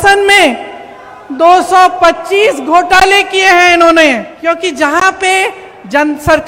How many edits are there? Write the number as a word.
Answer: one